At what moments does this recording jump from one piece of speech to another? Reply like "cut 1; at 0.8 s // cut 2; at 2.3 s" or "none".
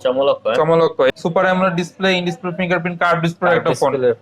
cut 1; at 1.1 s